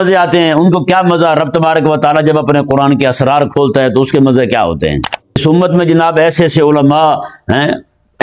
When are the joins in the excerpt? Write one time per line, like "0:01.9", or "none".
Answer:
0:05.4